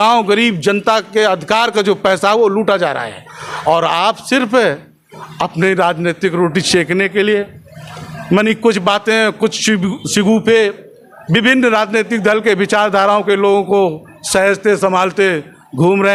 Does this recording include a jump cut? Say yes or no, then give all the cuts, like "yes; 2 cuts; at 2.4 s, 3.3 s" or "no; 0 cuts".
no; 0 cuts